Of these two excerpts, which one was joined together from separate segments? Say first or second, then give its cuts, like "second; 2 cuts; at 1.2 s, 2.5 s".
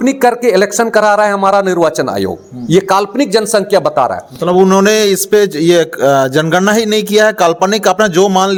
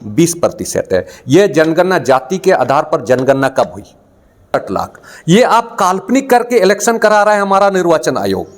second; 1 cut; at 4.5 s